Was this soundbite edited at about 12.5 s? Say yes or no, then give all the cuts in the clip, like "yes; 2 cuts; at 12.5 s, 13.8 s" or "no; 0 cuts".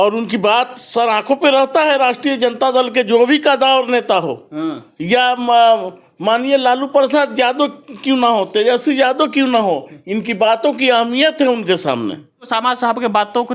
yes; 1 cut; at 12.5 s